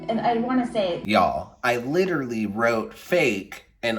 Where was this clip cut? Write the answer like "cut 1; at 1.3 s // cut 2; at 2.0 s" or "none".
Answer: cut 1; at 1.0 s